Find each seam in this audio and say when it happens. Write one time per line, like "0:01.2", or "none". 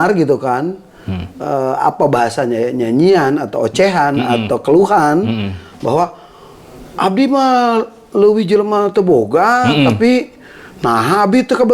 none